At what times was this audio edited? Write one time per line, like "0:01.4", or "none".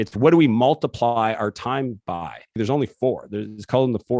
0:02.6